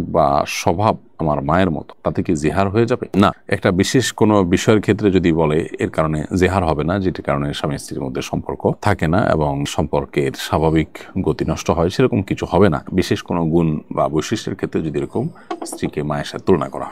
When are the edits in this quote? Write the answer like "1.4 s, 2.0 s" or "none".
none